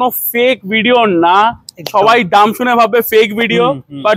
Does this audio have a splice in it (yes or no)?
no